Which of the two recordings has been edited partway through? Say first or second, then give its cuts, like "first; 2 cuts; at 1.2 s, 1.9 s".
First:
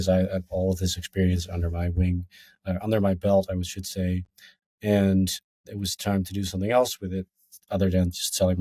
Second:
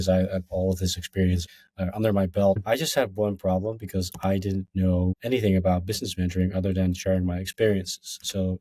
second; 3 cuts; at 1.5 s, 2.6 s, 5.2 s